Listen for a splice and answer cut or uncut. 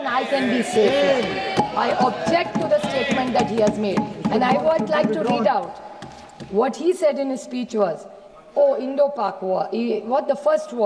uncut